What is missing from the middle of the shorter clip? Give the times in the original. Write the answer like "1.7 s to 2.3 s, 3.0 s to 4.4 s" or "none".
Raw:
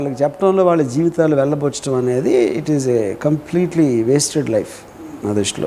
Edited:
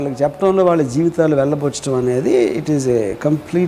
none

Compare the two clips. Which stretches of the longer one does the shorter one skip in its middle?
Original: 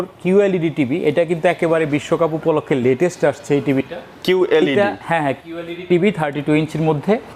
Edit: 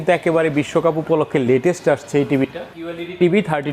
4.1 s to 5.5 s

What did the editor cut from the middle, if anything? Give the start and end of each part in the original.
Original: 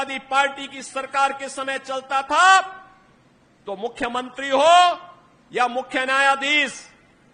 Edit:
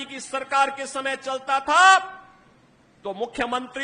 none

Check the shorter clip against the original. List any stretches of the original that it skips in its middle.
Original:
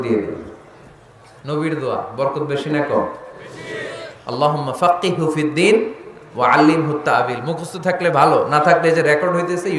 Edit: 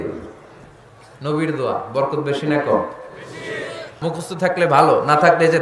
4.2 s to 7.4 s

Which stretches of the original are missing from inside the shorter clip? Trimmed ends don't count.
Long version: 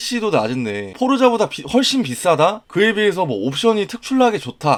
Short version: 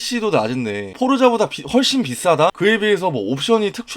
2.6 s to 2.7 s

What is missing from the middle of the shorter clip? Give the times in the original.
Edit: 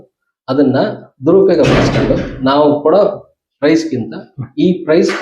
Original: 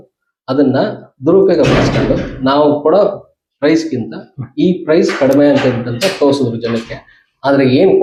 none

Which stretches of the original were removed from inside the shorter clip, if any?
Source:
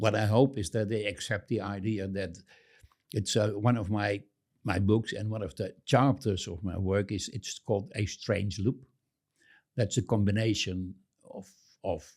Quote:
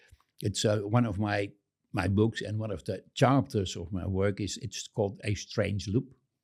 none

